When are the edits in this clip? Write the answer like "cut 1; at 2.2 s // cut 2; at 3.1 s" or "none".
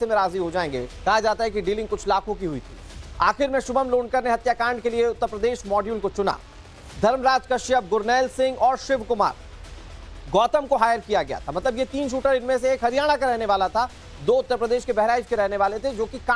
cut 1; at 15.5 s